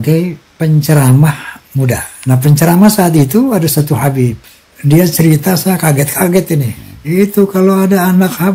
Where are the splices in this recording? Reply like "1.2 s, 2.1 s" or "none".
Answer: none

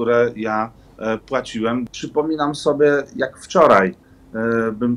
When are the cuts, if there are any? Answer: 1.9 s

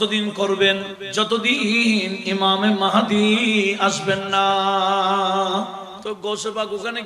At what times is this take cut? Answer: 1.0 s, 5.9 s

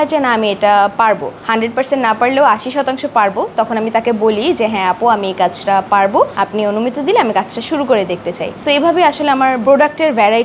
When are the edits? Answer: none

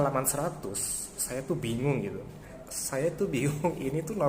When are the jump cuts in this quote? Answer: 2.6 s

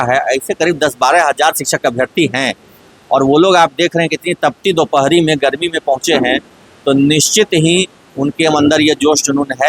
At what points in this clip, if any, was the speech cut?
none

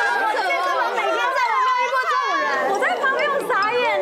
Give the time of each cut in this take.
none

